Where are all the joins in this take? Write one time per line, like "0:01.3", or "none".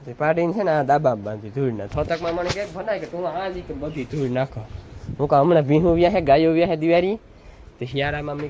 none

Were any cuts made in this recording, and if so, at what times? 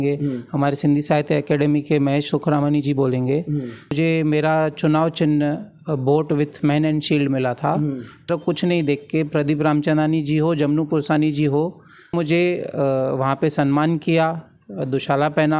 0:03.9
0:08.3
0:12.1

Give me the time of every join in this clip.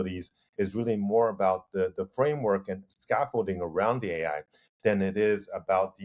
none

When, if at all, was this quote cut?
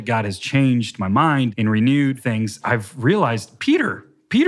0:01.5
0:02.5
0:03.5

